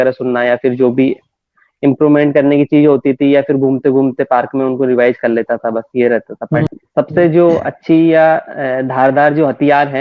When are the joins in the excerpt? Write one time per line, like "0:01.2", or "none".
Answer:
0:06.7